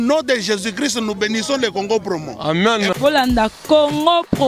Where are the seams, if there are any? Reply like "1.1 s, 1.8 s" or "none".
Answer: none